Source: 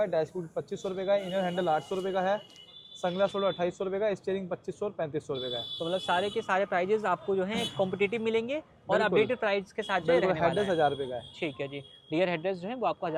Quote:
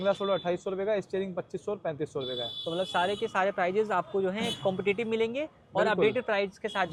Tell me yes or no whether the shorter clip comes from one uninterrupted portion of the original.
yes